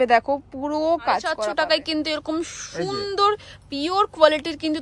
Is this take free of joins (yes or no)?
no